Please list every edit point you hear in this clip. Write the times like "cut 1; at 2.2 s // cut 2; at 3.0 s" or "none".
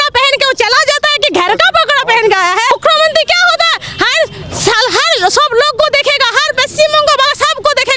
cut 1; at 2.7 s